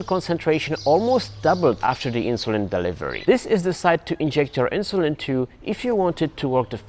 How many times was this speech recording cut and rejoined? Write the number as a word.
two